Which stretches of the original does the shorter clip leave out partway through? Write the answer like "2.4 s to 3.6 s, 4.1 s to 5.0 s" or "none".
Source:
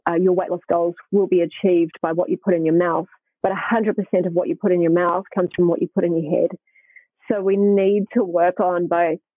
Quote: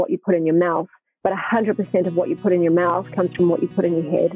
none